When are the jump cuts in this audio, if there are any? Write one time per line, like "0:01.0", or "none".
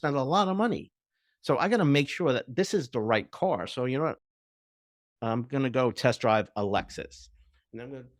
none